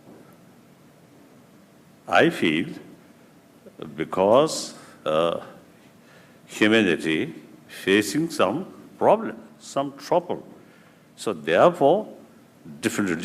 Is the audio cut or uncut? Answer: cut